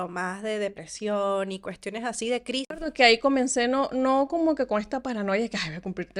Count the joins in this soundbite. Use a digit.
1